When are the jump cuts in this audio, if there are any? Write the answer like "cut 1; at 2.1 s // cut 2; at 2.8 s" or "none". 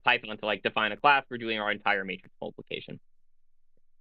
none